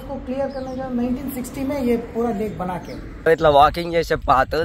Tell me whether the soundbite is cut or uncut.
cut